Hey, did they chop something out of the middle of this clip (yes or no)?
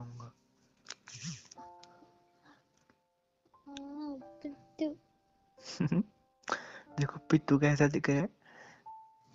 no